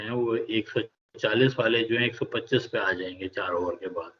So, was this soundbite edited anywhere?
no; 0 cuts

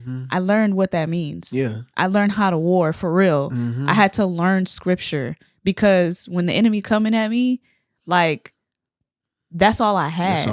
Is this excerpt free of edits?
yes; 0 cuts

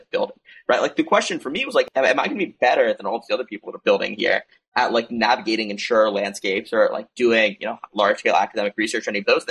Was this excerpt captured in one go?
no; 1 cut; at 1.9 s

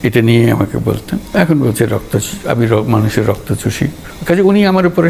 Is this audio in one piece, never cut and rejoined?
no; 2 cuts; at 1.2 s, 4.1 s

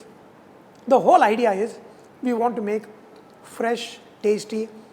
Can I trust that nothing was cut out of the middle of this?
yes; 0 cuts

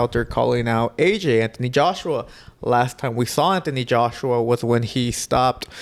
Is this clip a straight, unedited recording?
yes; 0 cuts

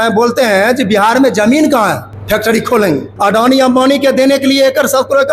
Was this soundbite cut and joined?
yes; 2 cuts; at 2.1 s, 3.1 s

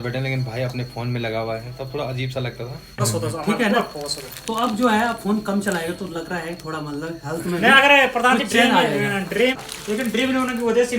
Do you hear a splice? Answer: yes; 2 cuts; at 3.1 s, 9.6 s

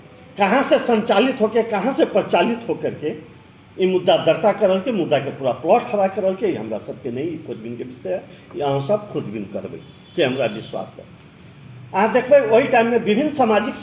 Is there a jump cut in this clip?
yes; 1 cut; at 4.8 s

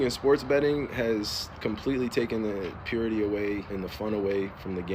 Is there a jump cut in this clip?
yes; 1 cut; at 3.7 s

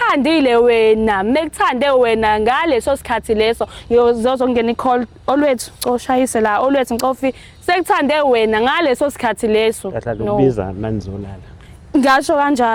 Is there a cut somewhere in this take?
no; 0 cuts

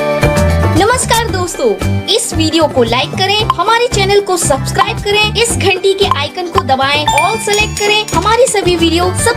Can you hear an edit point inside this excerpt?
no; 0 cuts

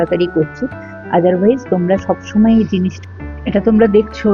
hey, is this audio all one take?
no; 1 cut; at 3.0 s

